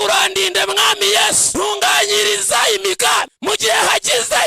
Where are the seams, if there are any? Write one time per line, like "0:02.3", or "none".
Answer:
0:01.4
0:03.3